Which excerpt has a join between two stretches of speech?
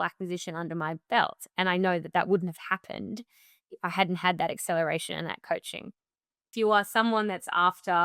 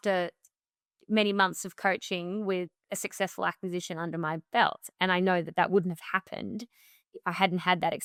first; 1 cut; at 6.4 s

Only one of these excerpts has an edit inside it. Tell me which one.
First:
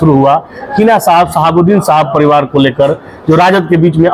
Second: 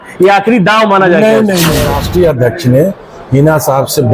second; 1 cut; at 1.9 s

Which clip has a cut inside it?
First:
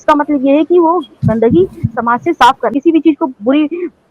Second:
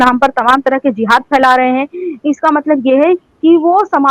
first; 1 cut; at 2.7 s

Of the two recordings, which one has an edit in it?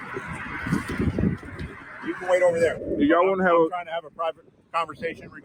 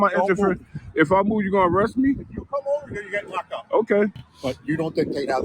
second; 1 cut; at 4.3 s

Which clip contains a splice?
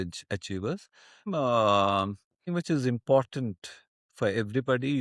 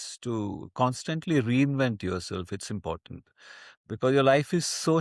first; 2 cuts; at 1.3 s, 2.5 s

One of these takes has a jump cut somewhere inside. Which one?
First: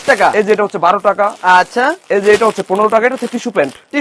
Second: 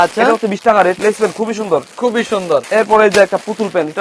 second; 2 cuts; at 1.0 s, 2.7 s

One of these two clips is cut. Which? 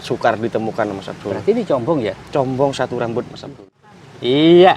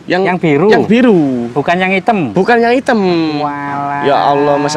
first; 1 cut; at 3.4 s

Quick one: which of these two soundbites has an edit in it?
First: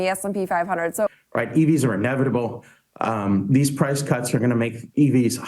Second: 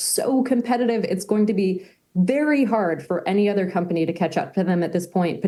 first; 1 cut; at 1.1 s

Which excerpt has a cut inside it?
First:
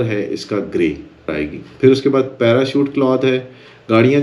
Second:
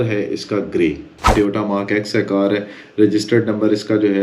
second; 1 cut; at 1.3 s

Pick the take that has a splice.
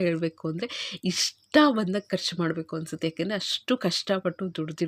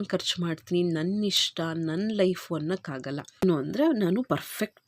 second; 1 cut; at 3.4 s

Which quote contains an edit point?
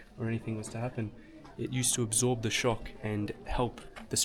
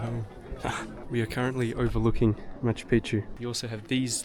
second; 2 cuts; at 1.0 s, 3.3 s

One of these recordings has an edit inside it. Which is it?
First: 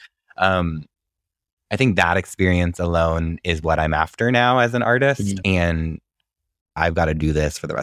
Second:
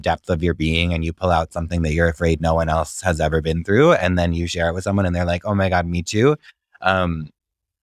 first; 1 cut; at 6.7 s

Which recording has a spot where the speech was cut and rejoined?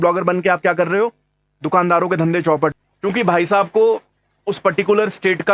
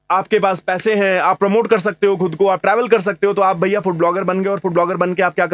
first; 1 cut; at 2.7 s

